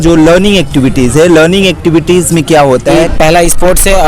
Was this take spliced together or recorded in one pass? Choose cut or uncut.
cut